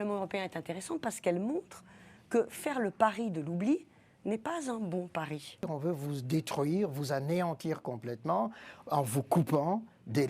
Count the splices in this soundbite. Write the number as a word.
one